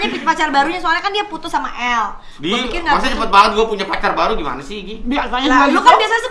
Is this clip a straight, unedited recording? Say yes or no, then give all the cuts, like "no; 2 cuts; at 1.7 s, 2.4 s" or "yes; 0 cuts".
yes; 0 cuts